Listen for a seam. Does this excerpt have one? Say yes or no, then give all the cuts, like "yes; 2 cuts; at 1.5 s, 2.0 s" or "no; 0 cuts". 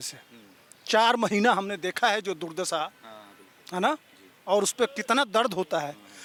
no; 0 cuts